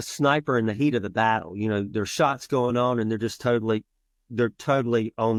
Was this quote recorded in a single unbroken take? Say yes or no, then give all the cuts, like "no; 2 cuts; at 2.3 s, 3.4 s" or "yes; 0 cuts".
yes; 0 cuts